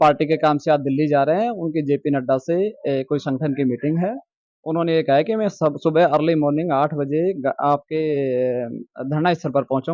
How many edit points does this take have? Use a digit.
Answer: 0